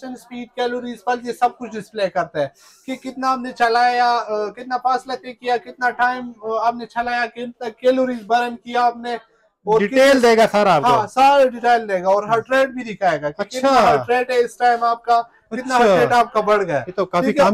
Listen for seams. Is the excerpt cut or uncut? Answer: uncut